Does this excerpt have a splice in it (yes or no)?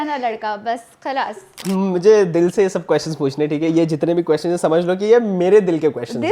yes